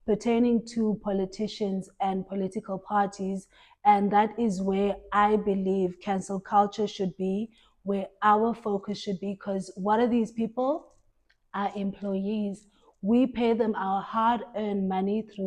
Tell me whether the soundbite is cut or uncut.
uncut